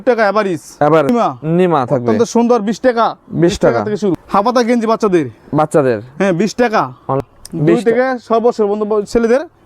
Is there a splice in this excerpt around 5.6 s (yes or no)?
no